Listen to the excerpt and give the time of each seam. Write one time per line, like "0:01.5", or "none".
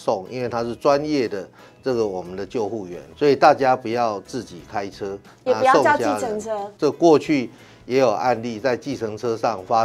0:03.0
0:06.6